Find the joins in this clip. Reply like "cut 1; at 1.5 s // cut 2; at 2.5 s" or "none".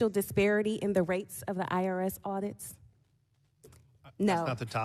none